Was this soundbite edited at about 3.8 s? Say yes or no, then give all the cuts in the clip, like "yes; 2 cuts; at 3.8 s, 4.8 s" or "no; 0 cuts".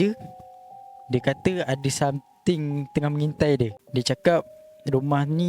yes; 1 cut; at 3.8 s